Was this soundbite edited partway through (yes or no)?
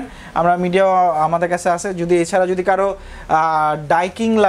no